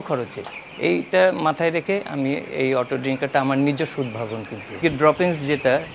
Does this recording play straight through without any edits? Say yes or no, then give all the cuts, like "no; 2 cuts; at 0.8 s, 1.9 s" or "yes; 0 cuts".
no; 1 cut; at 4.8 s